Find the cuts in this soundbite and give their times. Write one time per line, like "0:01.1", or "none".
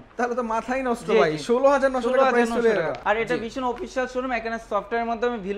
0:03.0